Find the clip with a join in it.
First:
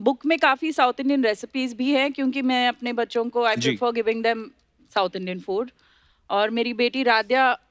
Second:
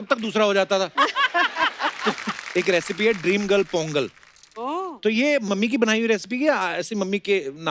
second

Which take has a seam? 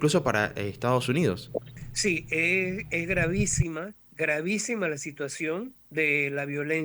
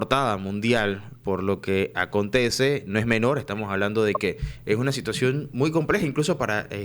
first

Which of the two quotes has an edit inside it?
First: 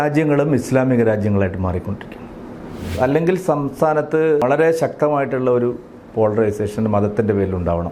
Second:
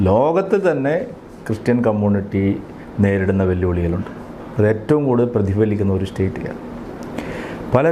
first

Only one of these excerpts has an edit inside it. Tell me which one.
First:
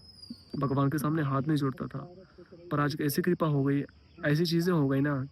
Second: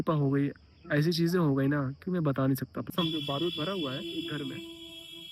second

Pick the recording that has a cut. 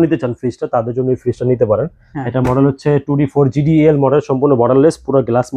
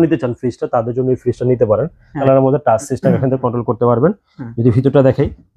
second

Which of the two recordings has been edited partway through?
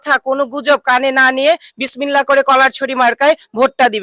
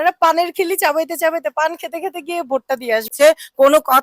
second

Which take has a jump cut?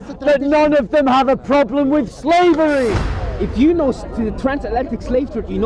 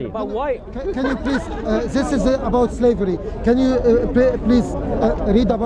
first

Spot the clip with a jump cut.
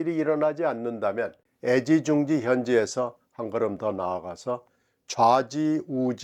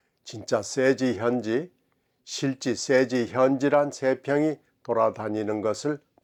first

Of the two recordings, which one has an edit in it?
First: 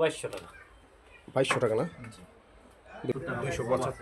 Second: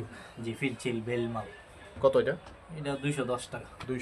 first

